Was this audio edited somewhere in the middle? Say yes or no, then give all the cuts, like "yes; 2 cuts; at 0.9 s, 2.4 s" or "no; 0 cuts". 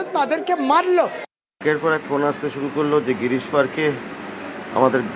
yes; 1 cut; at 1.5 s